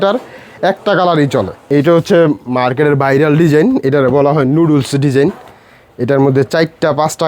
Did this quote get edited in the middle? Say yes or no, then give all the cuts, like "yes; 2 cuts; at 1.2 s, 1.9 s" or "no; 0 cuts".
yes; 1 cut; at 1.7 s